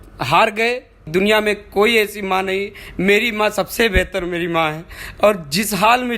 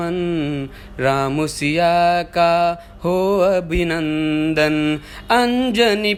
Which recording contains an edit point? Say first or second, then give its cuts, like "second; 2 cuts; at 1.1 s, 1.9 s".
first; 1 cut; at 1.0 s